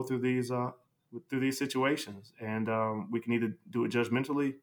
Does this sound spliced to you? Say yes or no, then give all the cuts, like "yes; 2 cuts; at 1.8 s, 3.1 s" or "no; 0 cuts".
no; 0 cuts